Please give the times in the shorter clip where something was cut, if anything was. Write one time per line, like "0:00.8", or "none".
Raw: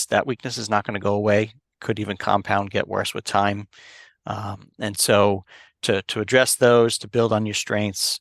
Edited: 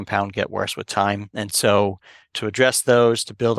0:01.3
0:02.3